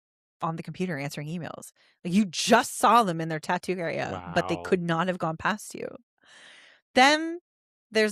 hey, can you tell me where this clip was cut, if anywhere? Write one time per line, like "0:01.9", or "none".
none

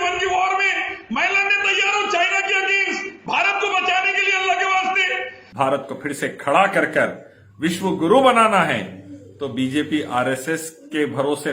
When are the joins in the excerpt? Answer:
0:05.4

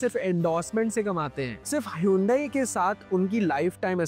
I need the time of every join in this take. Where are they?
0:01.5

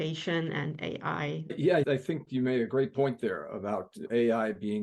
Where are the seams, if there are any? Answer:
0:01.5

